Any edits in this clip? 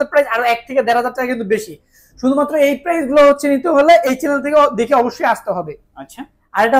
no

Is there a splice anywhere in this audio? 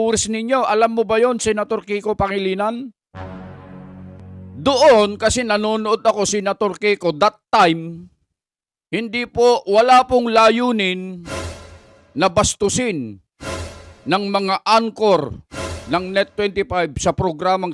yes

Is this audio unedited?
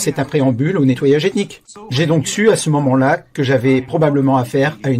no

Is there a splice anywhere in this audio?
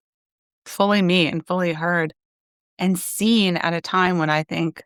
no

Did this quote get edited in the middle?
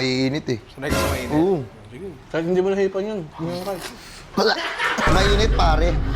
no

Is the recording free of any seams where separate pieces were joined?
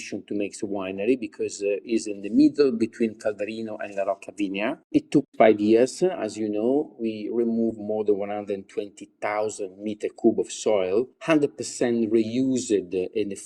no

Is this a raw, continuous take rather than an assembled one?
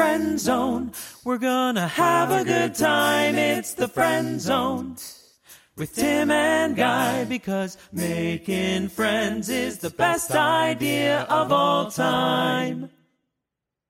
yes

